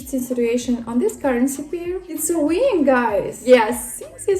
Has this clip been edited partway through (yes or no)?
yes